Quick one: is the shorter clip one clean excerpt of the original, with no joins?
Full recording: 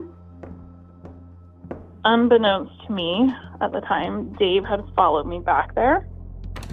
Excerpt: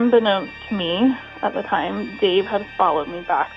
yes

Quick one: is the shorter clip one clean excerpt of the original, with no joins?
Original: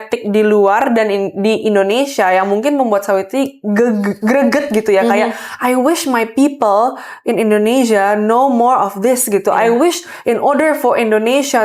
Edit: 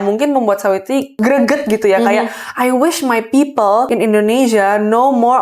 no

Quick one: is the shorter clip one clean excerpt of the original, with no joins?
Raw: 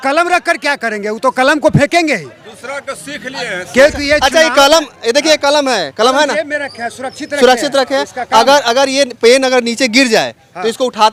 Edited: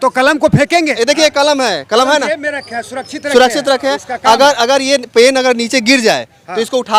no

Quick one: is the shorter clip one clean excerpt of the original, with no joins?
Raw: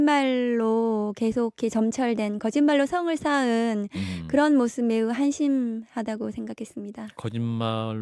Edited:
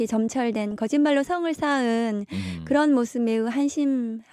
yes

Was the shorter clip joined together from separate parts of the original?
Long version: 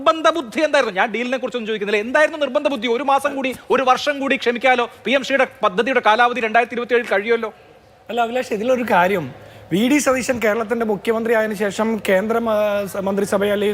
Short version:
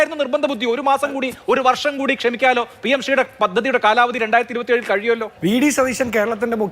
yes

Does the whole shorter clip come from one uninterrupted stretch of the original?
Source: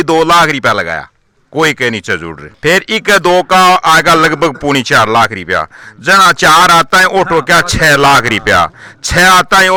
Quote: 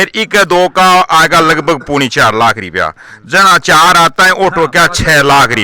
yes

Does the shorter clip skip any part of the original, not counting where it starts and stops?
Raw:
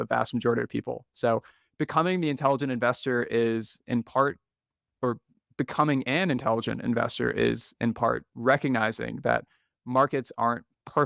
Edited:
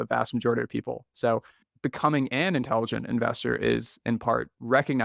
yes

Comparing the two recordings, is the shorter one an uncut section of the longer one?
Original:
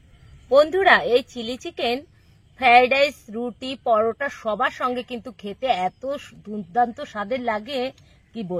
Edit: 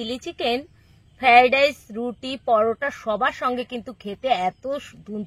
yes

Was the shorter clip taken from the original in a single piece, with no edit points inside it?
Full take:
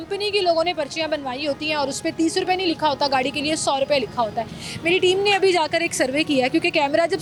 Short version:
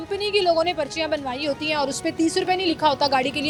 yes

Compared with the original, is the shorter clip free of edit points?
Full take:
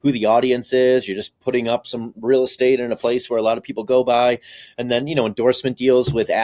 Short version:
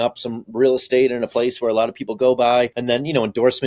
no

